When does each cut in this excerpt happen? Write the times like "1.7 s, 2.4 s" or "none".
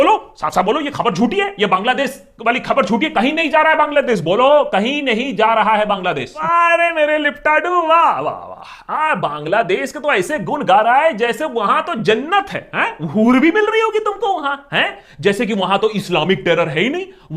6.3 s